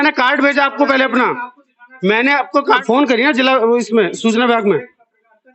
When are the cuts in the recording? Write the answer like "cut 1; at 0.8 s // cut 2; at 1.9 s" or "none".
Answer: cut 1; at 2.8 s